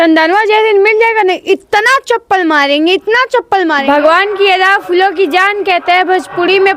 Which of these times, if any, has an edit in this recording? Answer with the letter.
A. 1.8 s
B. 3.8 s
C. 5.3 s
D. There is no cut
B